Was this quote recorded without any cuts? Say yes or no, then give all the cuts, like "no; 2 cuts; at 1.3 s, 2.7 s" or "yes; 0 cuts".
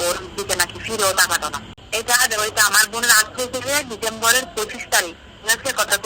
yes; 0 cuts